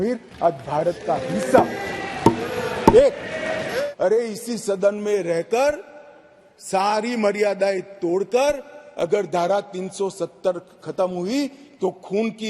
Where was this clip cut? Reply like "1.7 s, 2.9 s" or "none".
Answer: 3.8 s

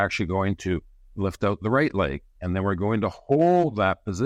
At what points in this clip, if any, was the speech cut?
none

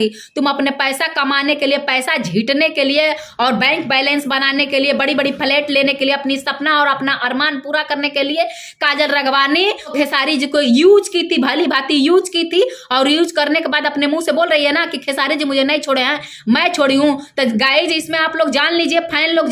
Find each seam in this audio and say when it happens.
9.9 s

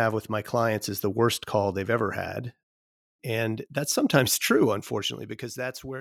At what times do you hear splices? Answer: none

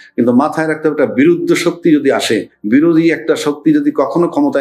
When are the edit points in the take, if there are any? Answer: none

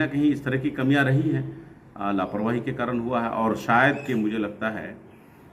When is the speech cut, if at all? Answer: none

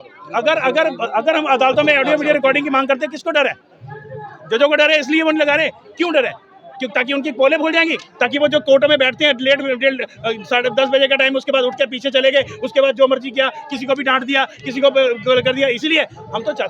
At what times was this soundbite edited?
none

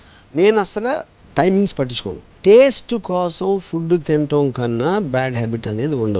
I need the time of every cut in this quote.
2.3 s

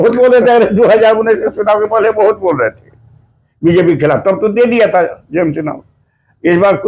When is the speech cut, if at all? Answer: none

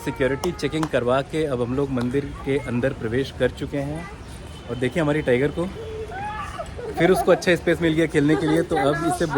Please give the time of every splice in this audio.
none

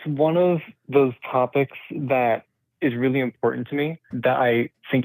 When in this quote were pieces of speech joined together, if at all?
4.1 s

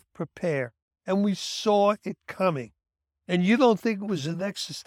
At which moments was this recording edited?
none

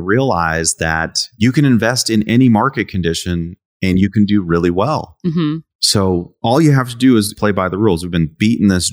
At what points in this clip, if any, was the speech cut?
none

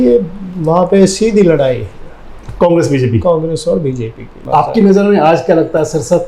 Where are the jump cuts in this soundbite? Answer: 4.3 s

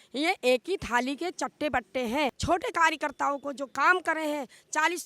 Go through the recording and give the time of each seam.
2.4 s

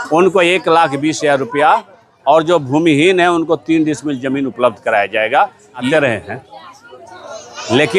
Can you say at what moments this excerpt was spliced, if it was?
5.9 s

